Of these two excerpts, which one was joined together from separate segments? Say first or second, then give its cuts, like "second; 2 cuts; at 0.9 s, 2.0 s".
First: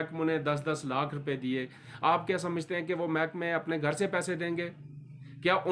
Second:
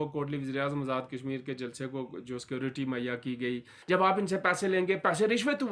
second; 1 cut; at 3.7 s